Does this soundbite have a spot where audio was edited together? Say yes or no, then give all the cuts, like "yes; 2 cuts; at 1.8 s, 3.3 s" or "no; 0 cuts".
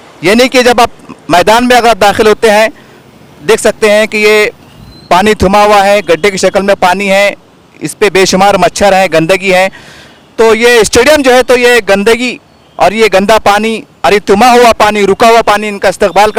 no; 0 cuts